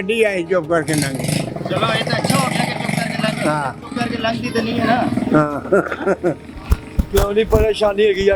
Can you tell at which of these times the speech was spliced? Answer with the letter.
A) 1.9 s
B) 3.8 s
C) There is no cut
C